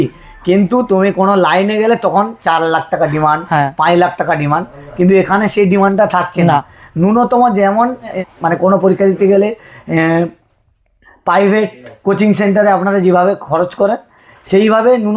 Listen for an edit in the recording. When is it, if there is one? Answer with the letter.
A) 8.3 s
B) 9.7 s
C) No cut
C